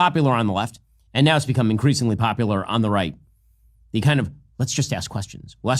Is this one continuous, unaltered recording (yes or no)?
no